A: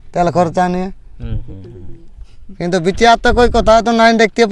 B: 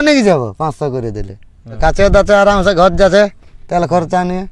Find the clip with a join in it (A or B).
B